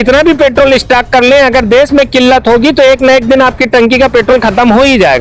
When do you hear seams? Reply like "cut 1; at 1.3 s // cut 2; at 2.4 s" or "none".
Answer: none